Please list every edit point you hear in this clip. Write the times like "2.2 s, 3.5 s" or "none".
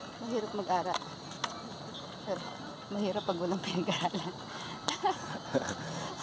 none